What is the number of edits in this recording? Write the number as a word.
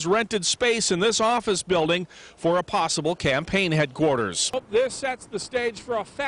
one